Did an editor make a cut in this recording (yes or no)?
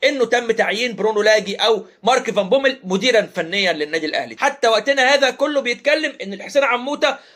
yes